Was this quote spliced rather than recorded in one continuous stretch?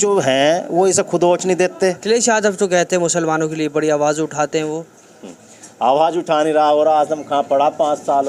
yes; 1 cut; at 2.0 s

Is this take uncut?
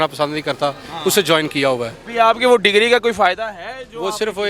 no; 1 cut; at 2.0 s

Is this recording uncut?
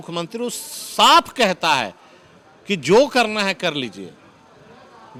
yes; 0 cuts

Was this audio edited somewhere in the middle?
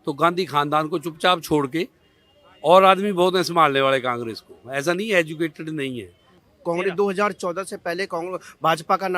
yes; 1 cut; at 6.5 s

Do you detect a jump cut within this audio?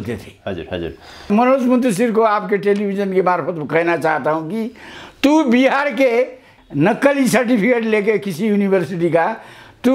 yes; 2 cuts; at 1.3 s, 6.5 s

